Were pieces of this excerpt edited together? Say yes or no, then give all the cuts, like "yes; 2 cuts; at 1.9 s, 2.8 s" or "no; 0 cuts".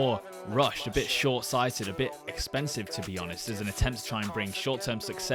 no; 0 cuts